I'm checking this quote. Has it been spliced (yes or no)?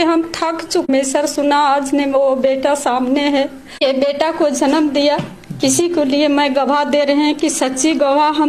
yes